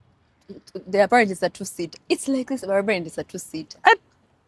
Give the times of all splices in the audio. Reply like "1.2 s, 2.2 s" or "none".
none